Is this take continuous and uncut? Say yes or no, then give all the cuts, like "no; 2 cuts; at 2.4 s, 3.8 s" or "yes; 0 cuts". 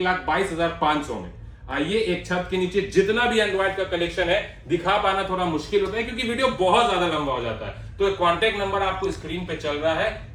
yes; 0 cuts